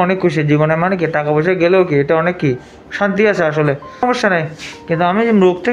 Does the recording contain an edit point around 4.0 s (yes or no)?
yes